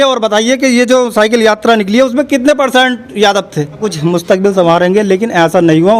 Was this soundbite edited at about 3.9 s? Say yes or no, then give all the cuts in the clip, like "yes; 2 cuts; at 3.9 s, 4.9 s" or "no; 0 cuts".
yes; 1 cut; at 3.9 s